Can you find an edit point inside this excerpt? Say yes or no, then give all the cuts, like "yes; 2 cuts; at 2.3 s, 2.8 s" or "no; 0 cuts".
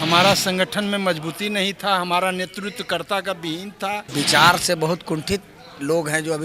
yes; 1 cut; at 4.1 s